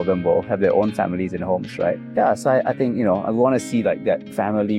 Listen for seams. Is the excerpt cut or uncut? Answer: uncut